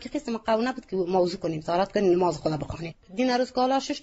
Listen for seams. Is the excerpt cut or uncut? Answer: uncut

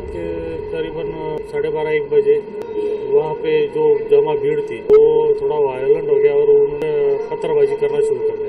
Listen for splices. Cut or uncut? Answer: cut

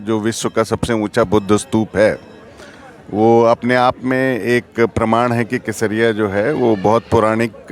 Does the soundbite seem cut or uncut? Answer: uncut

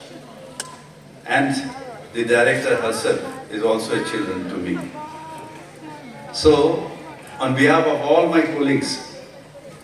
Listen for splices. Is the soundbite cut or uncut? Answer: uncut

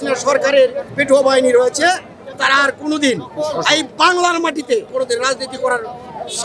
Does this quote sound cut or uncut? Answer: cut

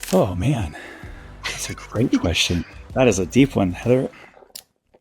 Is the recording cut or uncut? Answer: uncut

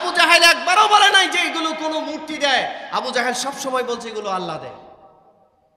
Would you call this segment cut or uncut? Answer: uncut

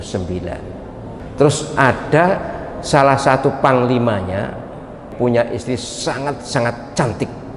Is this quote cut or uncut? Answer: cut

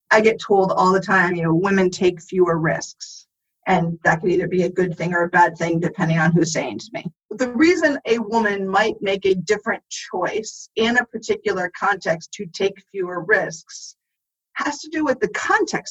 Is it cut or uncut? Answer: cut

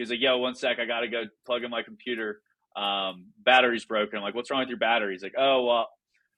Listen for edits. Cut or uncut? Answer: uncut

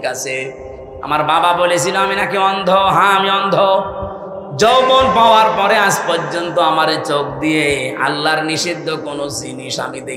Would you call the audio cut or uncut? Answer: uncut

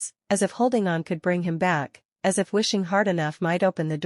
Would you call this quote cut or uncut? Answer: uncut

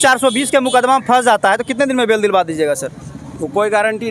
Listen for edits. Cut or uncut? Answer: uncut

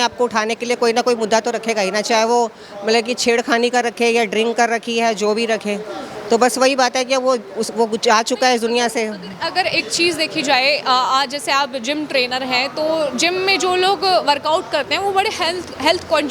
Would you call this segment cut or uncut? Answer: uncut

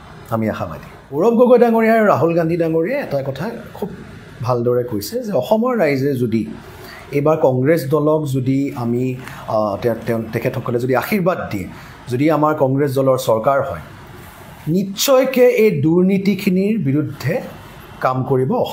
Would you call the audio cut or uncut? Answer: cut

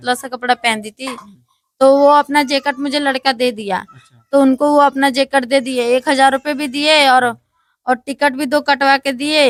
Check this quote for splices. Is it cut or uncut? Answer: uncut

